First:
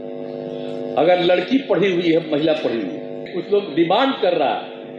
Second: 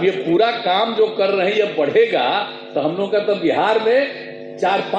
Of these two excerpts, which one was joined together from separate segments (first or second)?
first